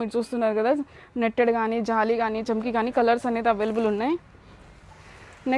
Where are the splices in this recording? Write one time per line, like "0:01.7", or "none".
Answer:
none